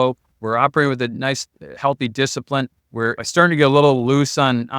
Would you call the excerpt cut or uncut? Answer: cut